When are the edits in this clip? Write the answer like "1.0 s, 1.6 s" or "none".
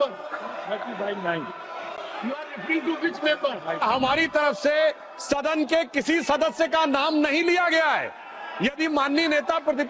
3.8 s